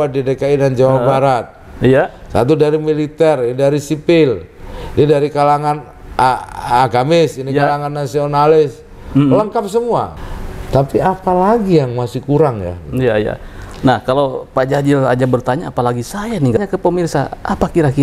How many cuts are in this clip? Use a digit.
2